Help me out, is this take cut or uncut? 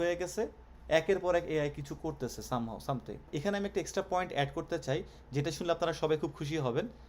cut